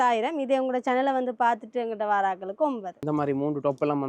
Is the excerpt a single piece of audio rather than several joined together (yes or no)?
no